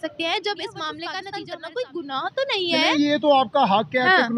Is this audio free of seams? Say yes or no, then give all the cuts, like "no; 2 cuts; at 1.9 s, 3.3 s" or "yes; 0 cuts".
no; 1 cut; at 1.2 s